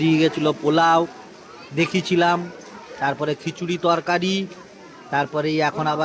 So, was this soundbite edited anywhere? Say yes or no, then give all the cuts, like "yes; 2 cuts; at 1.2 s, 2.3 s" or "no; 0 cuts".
no; 0 cuts